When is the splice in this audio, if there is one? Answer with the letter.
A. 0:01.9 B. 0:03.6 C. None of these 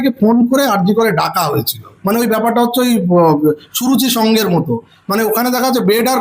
A